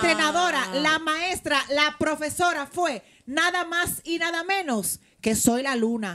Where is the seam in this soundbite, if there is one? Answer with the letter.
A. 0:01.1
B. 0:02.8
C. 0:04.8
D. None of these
D